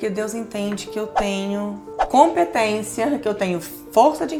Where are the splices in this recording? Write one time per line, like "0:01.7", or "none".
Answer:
none

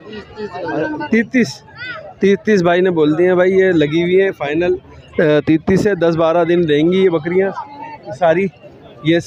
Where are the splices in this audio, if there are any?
none

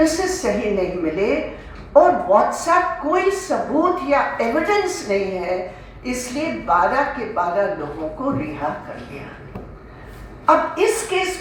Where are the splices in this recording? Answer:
none

